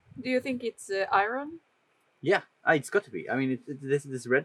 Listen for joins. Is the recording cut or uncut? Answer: uncut